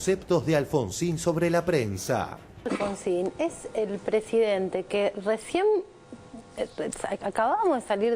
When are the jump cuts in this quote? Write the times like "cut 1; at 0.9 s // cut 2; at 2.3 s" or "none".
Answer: cut 1; at 2.7 s